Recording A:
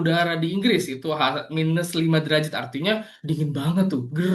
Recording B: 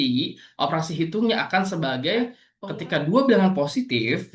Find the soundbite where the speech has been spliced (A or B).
B